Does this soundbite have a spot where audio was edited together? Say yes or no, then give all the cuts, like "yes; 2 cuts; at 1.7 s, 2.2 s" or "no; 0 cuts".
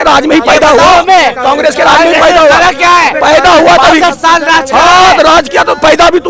no; 0 cuts